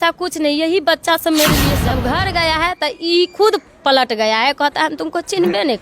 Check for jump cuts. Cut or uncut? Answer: cut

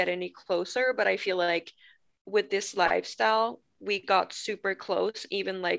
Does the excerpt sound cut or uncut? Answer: uncut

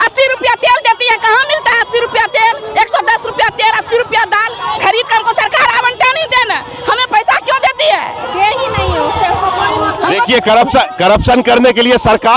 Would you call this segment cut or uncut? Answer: uncut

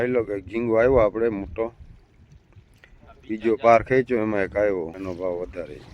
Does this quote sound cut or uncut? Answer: cut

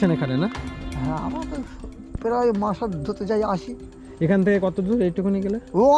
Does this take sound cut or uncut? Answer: uncut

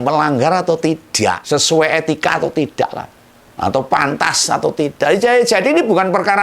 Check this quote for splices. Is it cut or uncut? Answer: cut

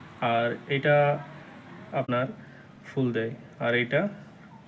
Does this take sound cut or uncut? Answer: cut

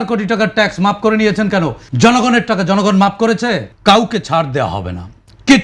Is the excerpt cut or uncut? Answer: cut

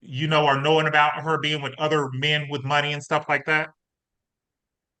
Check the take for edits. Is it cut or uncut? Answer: uncut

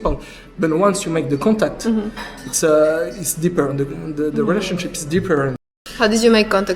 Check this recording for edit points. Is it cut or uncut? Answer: cut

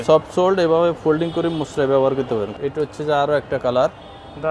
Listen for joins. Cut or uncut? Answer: cut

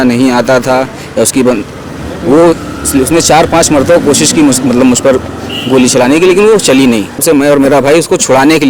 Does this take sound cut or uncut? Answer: cut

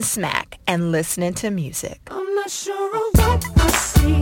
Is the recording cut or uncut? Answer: cut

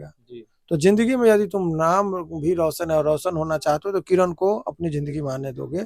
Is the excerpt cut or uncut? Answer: uncut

